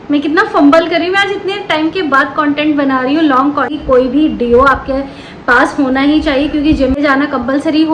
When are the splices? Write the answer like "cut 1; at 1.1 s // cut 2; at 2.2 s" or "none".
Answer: cut 1; at 3.8 s // cut 2; at 7.0 s